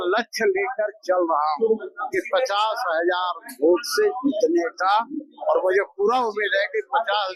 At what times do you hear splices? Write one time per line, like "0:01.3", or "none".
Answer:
none